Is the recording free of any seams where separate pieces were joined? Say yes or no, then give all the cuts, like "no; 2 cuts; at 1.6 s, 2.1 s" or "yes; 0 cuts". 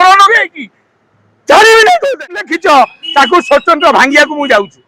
no; 1 cut; at 2.5 s